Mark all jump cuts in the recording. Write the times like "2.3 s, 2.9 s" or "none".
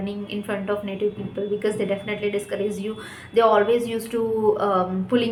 none